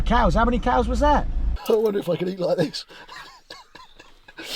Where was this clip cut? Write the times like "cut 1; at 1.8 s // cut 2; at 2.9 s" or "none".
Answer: cut 1; at 1.4 s